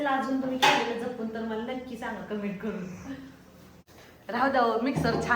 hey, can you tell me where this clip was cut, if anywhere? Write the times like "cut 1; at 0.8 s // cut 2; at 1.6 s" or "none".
cut 1; at 3.4 s